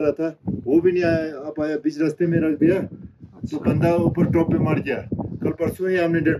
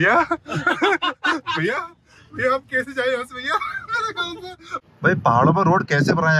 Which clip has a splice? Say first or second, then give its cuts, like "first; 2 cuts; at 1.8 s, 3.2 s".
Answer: second; 1 cut; at 4.8 s